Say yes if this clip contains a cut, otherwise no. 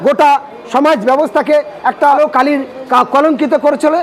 yes